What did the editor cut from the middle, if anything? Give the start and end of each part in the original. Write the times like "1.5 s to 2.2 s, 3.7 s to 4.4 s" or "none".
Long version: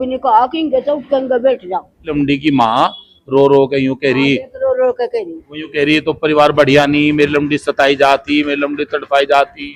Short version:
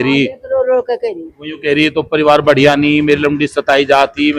none